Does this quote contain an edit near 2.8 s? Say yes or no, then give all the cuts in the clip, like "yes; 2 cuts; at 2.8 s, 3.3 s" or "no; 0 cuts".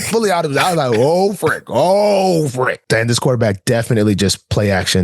yes; 1 cut; at 2.8 s